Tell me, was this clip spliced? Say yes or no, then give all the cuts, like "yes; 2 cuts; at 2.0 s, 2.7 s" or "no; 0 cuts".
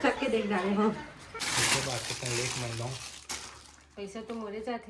yes; 1 cut; at 1.3 s